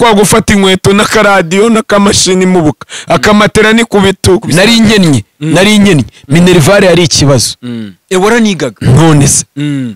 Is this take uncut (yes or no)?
no